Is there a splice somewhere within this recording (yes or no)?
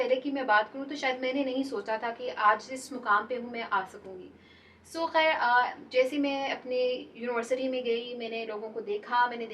no